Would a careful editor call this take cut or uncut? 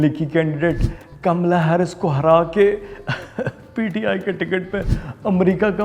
uncut